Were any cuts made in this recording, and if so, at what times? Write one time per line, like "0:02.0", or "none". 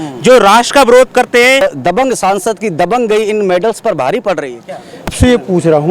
0:01.6
0:05.1